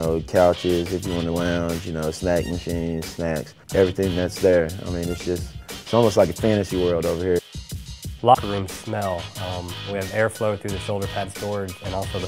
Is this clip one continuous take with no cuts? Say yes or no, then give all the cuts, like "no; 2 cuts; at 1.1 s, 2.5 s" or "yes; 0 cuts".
yes; 0 cuts